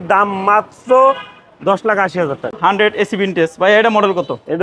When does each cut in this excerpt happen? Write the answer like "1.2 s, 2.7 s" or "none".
2.6 s